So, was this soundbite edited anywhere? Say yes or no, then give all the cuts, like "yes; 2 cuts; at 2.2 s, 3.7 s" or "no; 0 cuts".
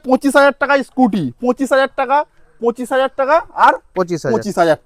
no; 0 cuts